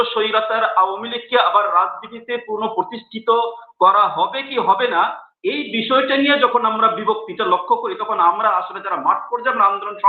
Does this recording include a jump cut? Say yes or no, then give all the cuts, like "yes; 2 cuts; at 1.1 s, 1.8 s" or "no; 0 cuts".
no; 0 cuts